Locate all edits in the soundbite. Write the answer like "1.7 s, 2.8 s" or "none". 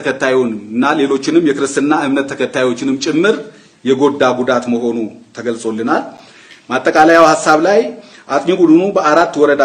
none